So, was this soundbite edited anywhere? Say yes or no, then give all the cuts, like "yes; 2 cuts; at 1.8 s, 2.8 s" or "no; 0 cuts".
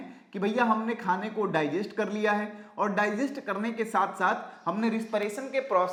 no; 0 cuts